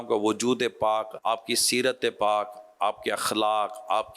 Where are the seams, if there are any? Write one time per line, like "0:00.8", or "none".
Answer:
0:01.1